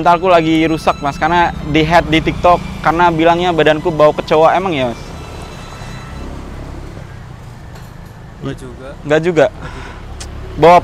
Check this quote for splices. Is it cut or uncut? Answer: uncut